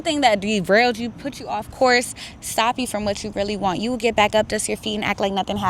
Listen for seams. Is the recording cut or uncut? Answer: uncut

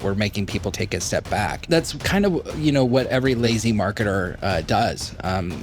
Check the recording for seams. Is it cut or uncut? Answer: cut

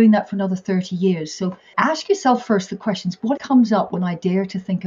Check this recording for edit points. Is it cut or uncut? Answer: cut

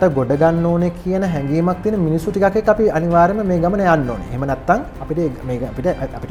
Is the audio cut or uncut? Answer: uncut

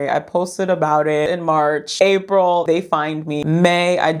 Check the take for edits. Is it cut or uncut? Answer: cut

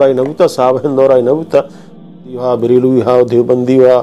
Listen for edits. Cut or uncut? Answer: cut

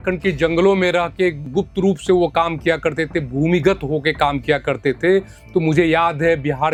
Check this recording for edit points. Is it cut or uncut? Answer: uncut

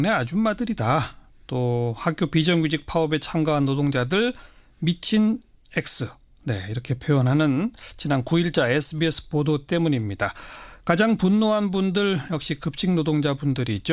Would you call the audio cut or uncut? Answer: uncut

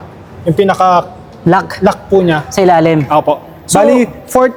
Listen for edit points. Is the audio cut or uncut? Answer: uncut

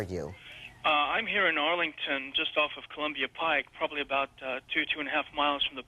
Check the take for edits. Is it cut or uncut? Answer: cut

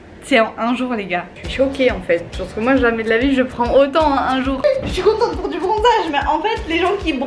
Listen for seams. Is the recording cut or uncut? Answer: cut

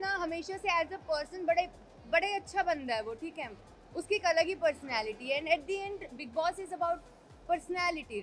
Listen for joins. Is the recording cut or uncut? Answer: uncut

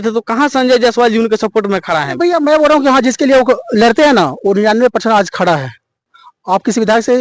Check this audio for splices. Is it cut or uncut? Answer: cut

